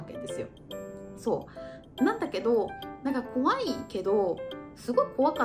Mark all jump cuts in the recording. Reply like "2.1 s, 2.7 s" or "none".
none